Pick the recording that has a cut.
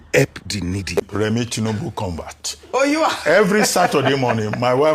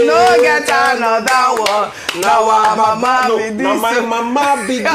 first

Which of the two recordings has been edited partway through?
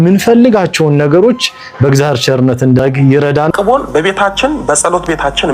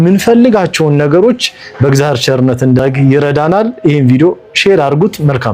first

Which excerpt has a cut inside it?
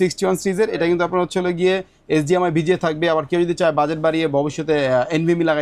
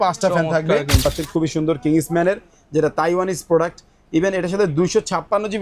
second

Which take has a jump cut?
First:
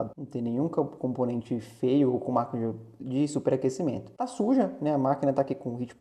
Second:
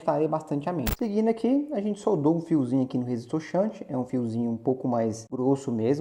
second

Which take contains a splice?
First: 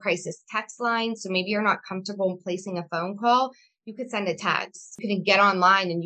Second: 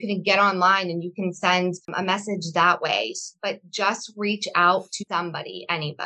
second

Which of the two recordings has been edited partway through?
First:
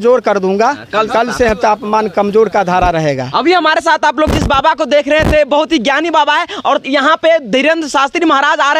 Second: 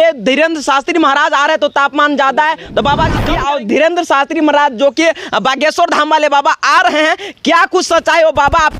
second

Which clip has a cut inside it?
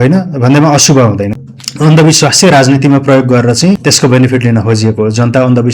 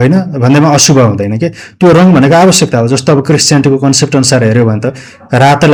first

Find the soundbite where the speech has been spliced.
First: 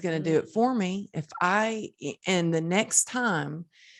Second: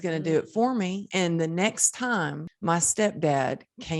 second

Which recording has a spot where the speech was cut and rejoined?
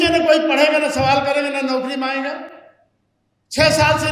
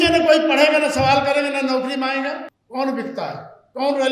second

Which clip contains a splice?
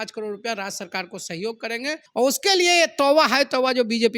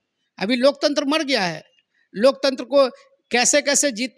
first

